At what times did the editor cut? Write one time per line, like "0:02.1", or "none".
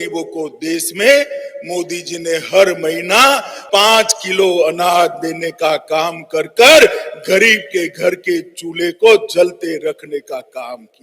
0:03.5